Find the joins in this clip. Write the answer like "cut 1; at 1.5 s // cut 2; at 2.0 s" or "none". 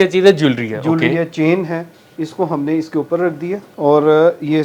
cut 1; at 3.7 s